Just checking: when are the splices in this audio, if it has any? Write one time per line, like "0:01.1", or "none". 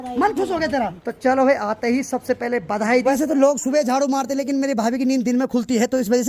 0:01.0
0:03.1